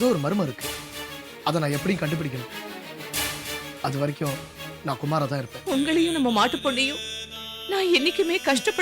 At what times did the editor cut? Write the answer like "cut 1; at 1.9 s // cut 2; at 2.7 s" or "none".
cut 1; at 5.5 s